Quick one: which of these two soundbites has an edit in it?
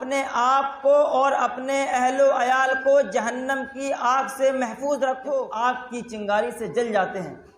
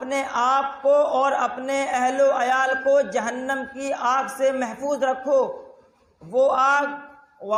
first; 1 cut; at 5.5 s

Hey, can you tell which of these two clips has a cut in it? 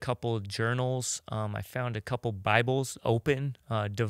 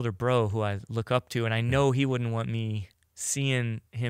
first; 1 cut; at 2.4 s

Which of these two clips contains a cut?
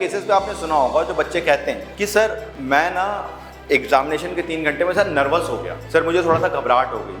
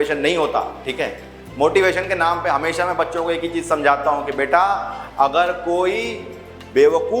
first; 3 cuts; at 1.9 s, 2.5 s, 5.7 s

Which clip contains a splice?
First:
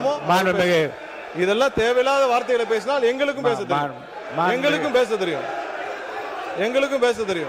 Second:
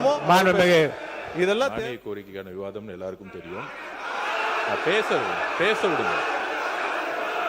second; 1 cut; at 1.7 s

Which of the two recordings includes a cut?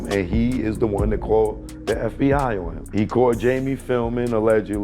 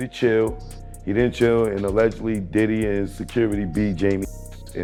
first; 1 cut; at 2.8 s

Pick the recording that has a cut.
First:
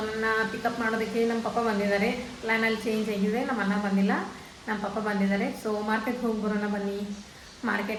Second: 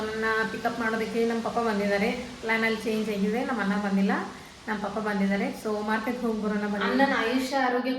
second; 1 cut; at 6.8 s

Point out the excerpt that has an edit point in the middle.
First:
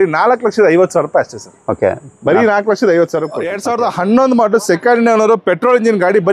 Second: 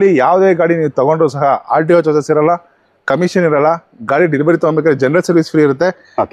first; 1 cut; at 3.5 s

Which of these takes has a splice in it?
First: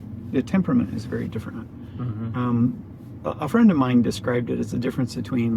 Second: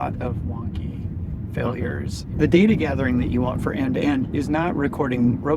second; 1 cut; at 2.3 s

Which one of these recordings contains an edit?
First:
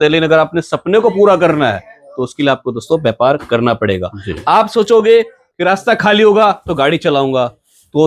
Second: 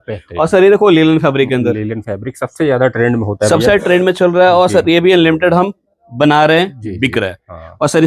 first; 1 cut; at 5.4 s

